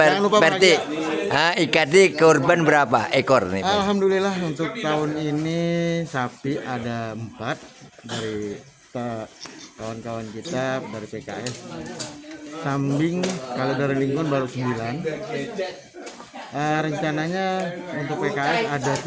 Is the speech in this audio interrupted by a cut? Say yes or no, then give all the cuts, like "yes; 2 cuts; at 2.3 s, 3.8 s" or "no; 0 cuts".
no; 0 cuts